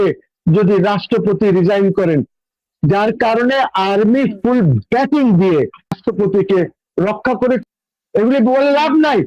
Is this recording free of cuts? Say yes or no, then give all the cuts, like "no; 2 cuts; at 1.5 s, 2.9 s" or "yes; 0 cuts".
no; 2 cuts; at 6.0 s, 7.6 s